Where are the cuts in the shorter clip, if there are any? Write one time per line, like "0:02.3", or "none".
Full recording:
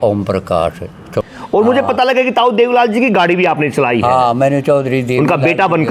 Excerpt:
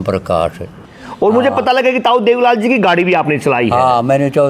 0:00.9

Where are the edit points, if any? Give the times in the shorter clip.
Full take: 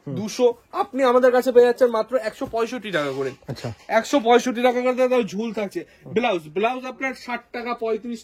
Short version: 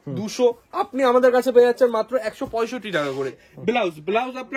0:03.4

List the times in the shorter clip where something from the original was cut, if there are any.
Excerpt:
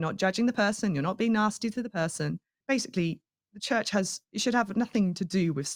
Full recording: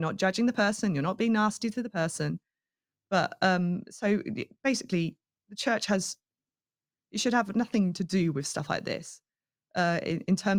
0:02.5
0:04.2

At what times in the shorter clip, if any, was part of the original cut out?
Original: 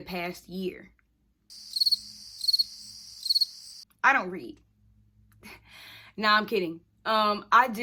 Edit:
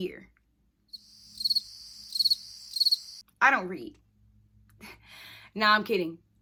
none

